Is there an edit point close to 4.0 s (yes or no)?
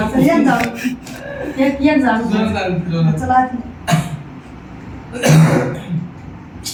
no